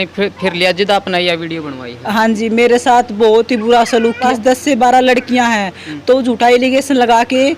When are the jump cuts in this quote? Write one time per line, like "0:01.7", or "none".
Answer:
0:04.2